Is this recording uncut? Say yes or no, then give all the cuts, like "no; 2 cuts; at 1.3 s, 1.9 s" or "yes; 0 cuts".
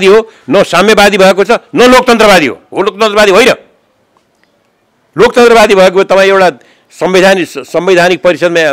yes; 0 cuts